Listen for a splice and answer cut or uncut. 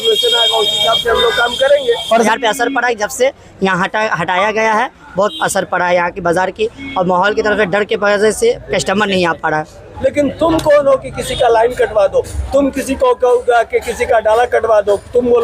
cut